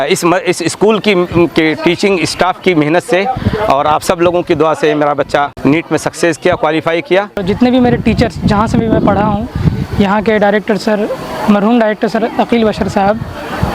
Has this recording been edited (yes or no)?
yes